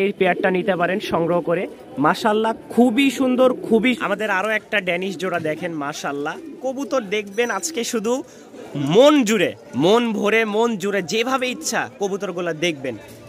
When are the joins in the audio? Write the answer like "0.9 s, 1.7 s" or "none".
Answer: 4.0 s